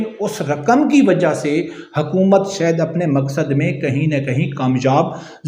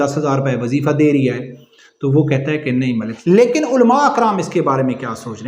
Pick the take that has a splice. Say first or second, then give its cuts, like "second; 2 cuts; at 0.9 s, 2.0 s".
second; 1 cut; at 3.1 s